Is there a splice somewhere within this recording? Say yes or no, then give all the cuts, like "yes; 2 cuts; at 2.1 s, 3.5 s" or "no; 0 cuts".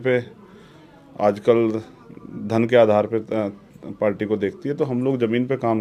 no; 0 cuts